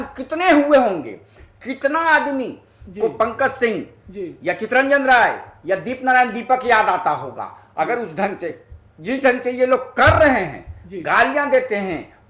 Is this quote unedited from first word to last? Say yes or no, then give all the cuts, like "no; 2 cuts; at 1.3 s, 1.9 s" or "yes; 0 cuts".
yes; 0 cuts